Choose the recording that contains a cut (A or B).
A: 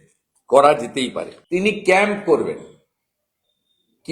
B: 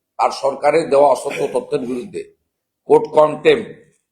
A